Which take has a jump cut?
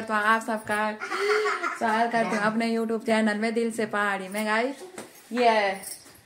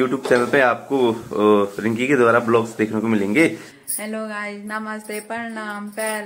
second; 1 cut; at 3.7 s

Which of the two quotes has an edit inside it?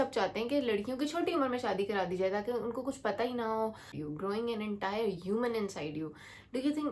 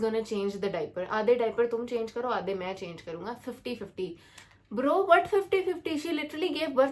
first; 1 cut; at 3.9 s

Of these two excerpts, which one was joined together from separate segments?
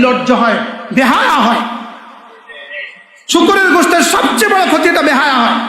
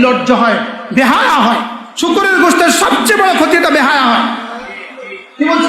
second; 1 cut; at 1.8 s

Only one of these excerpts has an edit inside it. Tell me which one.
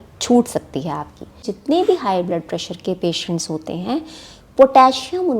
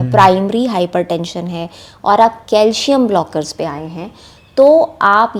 first; 1 cut; at 1.5 s

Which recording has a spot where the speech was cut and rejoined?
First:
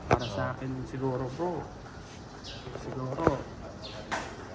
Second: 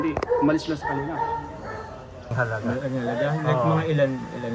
second; 1 cut; at 2.3 s

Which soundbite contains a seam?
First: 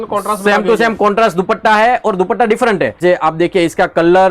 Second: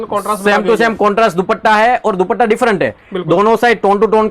first; 1 cut; at 3.0 s

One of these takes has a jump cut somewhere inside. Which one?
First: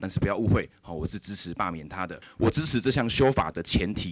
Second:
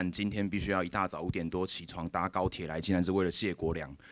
first; 1 cut; at 2.2 s

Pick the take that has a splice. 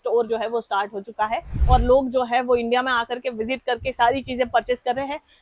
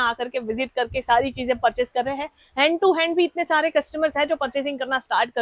first; 1 cut; at 1.5 s

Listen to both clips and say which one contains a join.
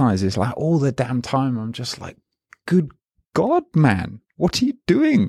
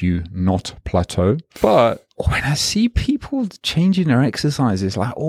second; 3 cuts; at 1.5 s, 2.1 s, 3.5 s

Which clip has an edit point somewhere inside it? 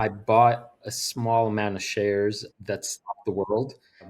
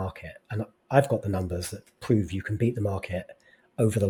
first; 2 cuts; at 0.9 s, 2.5 s

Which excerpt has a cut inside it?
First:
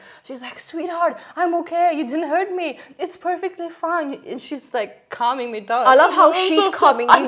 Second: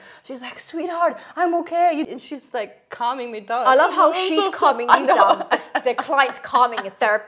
second; 1 cut; at 2.1 s

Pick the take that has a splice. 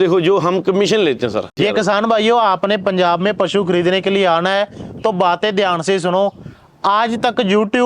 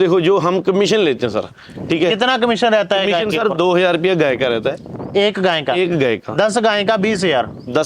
first; 1 cut; at 1.6 s

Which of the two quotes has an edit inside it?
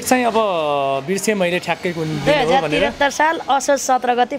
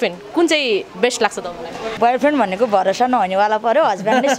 second; 1 cut; at 1.9 s

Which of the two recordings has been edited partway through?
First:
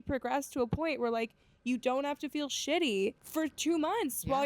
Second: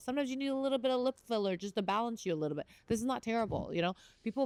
first; 1 cut; at 3.2 s

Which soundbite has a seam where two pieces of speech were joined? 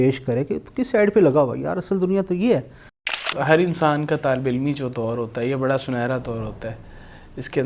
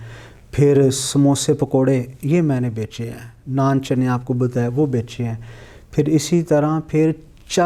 first; 1 cut; at 3.3 s

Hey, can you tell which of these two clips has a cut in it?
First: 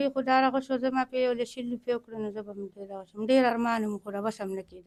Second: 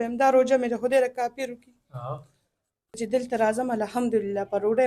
second; 1 cut; at 3.0 s

